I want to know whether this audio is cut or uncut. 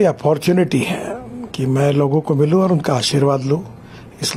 uncut